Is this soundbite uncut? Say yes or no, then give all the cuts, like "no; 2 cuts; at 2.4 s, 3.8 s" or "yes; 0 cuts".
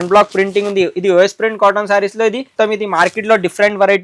no; 1 cut; at 2.5 s